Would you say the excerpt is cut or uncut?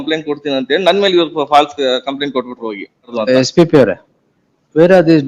cut